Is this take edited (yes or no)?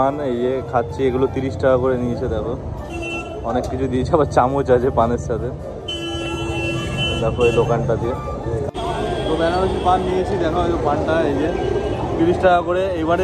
no